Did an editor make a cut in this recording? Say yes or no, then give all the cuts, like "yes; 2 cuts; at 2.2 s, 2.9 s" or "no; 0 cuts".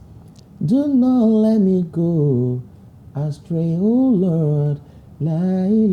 no; 0 cuts